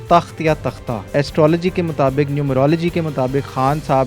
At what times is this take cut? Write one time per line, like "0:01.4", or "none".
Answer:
0:01.1

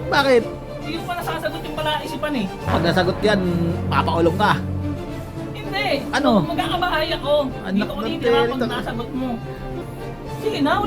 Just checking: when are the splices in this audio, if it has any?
0:09.9

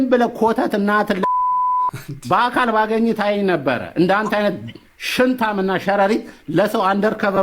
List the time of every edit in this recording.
none

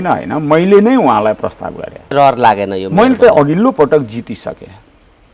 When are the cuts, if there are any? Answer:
0:02.1

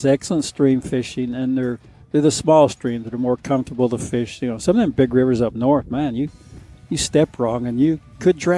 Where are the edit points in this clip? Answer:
none

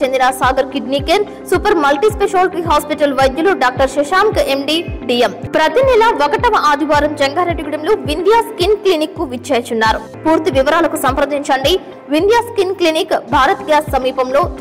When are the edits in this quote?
0:05.4
0:10.1

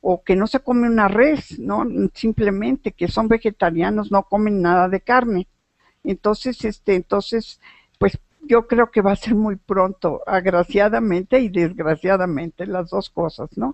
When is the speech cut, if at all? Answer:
0:01.1

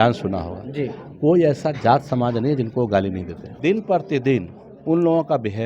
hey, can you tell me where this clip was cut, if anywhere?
0:03.5

